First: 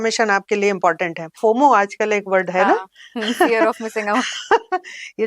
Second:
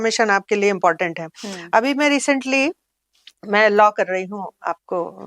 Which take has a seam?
first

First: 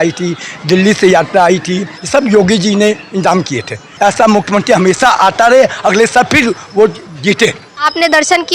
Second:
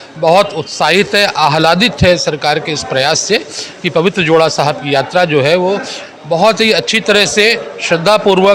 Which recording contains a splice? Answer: first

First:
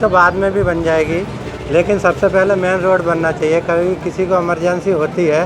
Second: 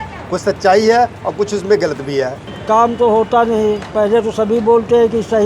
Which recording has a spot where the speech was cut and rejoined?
second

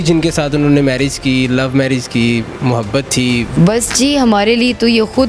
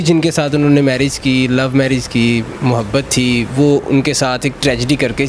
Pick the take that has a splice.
first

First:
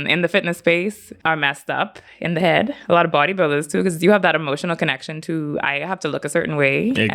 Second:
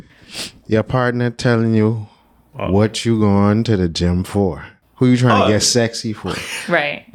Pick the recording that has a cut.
first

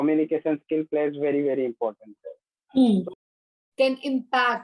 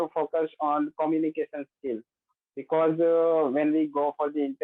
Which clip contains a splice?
first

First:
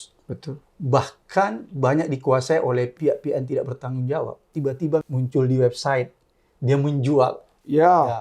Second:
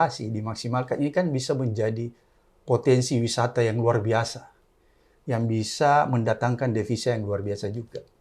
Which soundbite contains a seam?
first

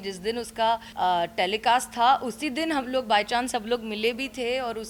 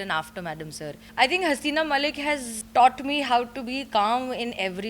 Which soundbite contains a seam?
second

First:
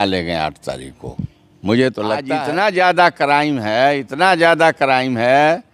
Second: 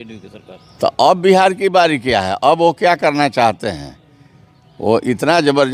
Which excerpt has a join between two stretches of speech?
first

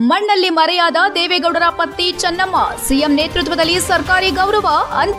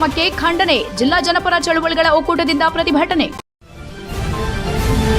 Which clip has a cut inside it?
second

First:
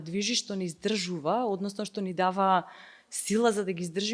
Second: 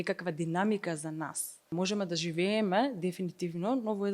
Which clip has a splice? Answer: second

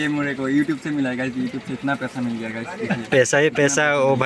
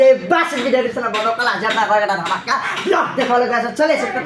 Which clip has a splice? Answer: first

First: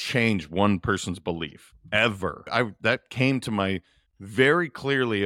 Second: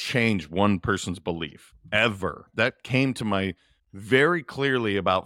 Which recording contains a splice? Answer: second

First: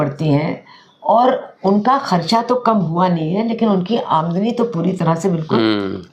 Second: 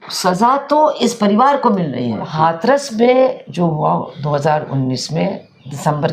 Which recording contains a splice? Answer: second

